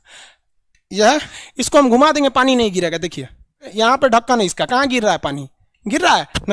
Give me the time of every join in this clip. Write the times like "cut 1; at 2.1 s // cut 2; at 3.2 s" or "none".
cut 1; at 1.4 s // cut 2; at 3.6 s